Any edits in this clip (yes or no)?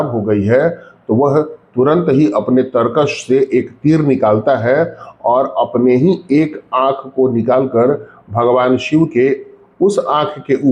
no